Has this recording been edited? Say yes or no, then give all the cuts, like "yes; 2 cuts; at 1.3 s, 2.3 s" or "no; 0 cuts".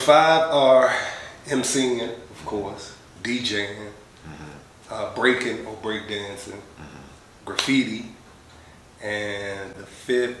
no; 0 cuts